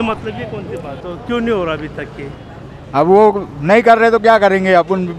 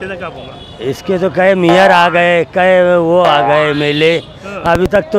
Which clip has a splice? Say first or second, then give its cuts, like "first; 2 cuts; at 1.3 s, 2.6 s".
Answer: first; 1 cut; at 0.9 s